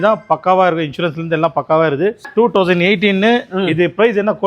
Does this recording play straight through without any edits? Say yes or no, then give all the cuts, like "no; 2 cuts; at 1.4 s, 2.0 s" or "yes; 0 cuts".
no; 1 cut; at 2.3 s